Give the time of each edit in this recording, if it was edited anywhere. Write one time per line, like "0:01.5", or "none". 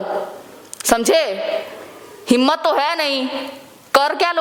none